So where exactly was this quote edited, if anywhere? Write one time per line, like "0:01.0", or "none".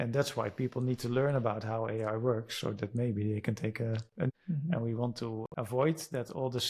0:04.3